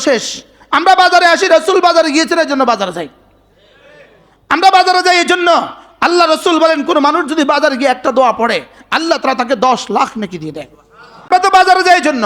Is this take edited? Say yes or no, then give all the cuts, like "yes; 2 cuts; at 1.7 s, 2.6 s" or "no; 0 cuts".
yes; 1 cut; at 11.3 s